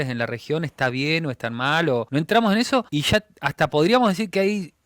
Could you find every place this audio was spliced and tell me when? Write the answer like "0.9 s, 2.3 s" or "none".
2.1 s, 2.9 s